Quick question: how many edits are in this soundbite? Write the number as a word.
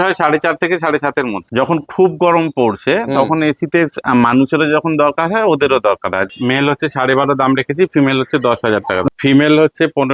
three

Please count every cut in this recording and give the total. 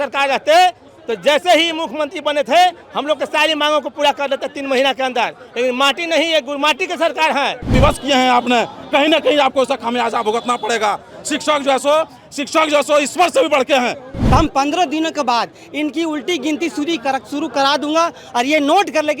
two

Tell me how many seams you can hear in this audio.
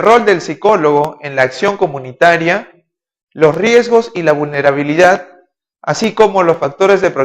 one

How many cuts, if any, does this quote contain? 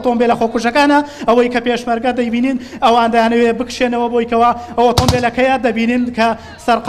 one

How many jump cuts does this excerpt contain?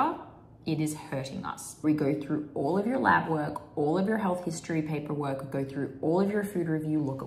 one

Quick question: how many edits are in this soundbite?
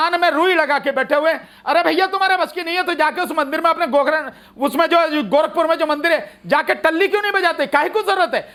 zero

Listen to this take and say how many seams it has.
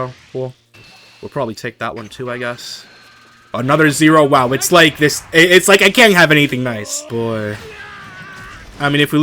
one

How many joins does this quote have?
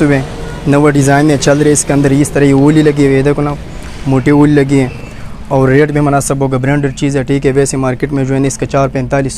zero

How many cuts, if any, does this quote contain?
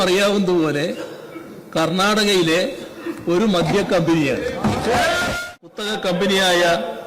one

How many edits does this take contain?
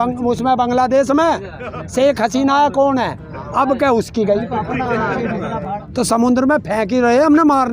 one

